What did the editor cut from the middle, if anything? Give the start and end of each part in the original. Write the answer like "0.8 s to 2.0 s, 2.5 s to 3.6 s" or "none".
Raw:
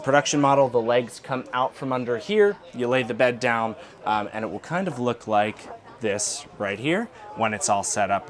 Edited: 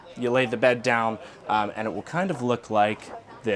none